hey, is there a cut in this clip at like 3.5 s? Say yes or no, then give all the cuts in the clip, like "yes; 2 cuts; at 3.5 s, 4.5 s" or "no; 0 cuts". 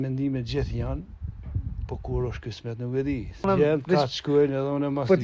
yes; 1 cut; at 3.5 s